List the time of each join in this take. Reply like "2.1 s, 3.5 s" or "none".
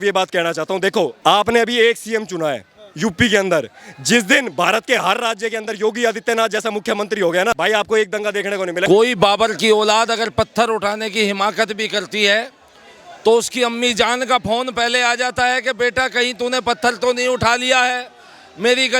1.1 s, 7.5 s, 8.9 s